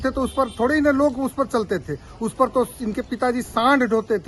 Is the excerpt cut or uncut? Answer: uncut